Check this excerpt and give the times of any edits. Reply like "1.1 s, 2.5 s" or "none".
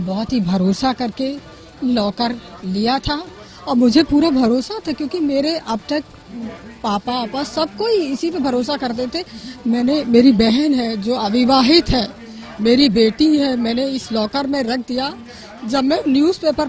none

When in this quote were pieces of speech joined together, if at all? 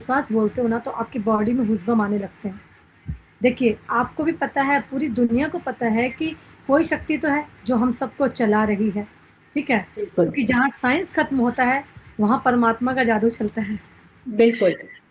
none

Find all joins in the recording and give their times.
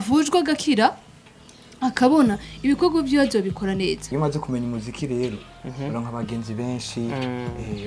4.0 s

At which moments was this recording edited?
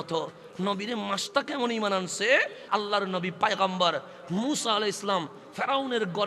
2.7 s

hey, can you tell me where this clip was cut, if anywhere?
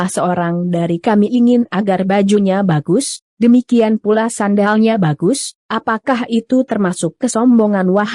7.2 s

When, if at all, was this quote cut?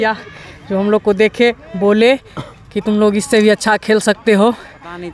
none

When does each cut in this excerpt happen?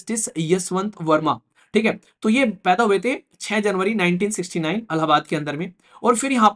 none

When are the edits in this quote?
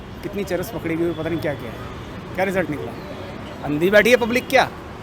none

